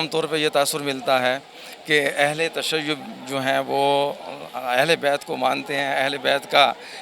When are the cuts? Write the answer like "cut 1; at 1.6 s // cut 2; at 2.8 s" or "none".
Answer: none